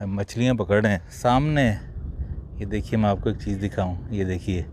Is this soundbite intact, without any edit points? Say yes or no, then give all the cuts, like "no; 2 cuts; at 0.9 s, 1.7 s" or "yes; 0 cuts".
no; 1 cut; at 1.1 s